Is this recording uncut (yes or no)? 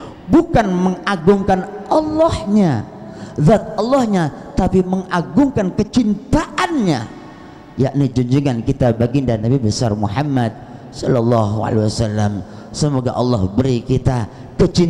yes